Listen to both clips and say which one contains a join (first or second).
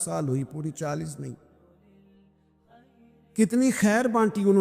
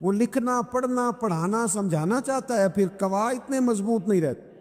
first